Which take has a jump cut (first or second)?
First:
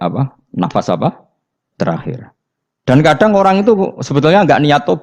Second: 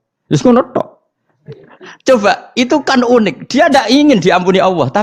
second